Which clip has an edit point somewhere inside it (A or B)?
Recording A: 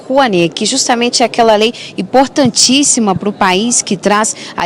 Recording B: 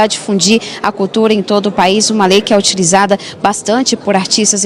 A